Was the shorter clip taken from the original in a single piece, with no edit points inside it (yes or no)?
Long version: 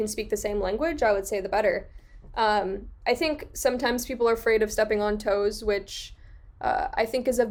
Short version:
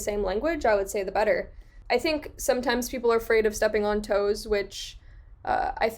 no